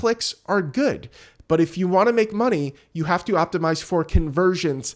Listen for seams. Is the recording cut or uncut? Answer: uncut